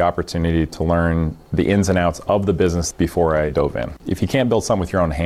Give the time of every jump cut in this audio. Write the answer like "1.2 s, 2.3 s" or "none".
2.8 s, 4.0 s